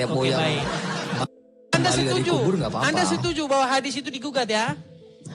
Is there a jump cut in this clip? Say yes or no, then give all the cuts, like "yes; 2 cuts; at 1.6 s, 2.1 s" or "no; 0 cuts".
no; 0 cuts